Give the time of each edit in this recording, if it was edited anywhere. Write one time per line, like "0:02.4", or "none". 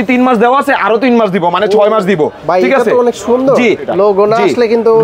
0:03.8